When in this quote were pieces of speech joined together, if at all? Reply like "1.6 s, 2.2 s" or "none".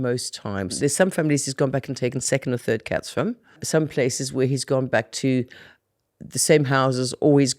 0.7 s, 3.6 s